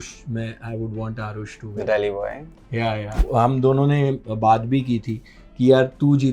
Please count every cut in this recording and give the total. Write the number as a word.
one